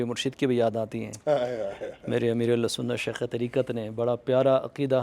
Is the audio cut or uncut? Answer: uncut